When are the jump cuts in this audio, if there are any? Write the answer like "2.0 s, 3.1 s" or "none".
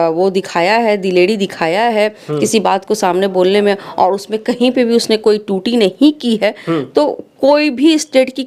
none